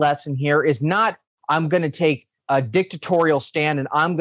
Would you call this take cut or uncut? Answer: cut